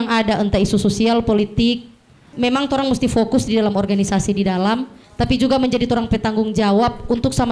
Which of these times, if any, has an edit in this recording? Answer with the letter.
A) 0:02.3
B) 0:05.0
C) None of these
A